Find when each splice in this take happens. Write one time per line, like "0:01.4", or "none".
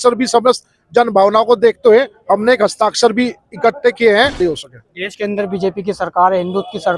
0:04.4